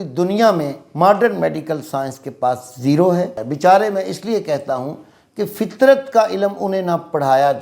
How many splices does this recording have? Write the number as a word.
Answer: one